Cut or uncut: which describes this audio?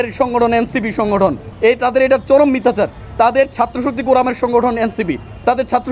cut